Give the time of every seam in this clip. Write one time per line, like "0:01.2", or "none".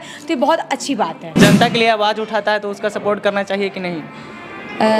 0:01.3